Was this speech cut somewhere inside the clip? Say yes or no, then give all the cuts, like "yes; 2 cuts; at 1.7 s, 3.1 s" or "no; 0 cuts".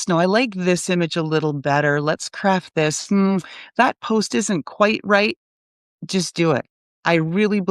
no; 0 cuts